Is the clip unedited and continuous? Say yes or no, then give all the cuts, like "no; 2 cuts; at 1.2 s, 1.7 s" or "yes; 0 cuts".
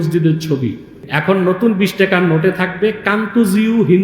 no; 1 cut; at 1.0 s